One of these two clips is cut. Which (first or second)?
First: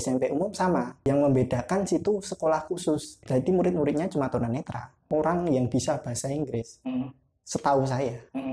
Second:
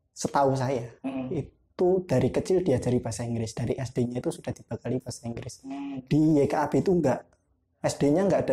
first